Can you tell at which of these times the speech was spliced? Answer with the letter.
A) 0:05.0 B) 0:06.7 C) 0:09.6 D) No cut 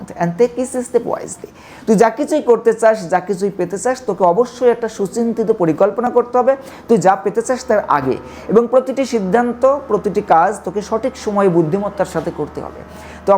D